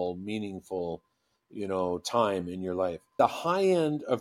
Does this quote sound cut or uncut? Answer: cut